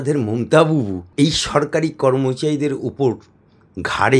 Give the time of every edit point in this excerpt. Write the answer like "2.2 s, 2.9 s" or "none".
1.0 s

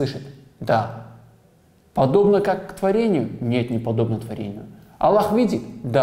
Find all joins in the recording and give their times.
none

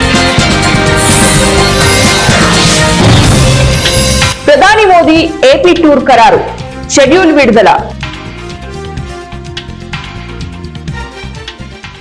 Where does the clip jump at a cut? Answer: 1.0 s

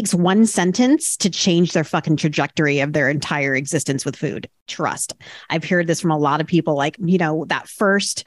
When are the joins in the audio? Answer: 7.0 s

